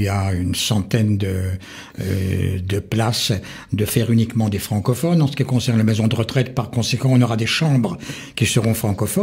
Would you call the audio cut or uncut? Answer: uncut